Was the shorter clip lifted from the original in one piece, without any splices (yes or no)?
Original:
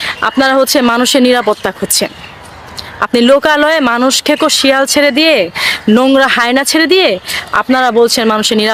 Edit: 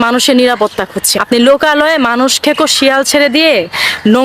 no